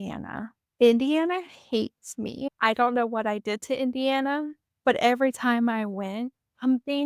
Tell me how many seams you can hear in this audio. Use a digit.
0